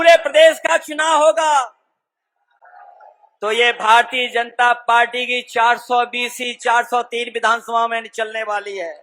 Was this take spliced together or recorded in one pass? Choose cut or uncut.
uncut